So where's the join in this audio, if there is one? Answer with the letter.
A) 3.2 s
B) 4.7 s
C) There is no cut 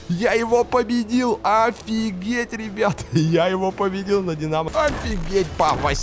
B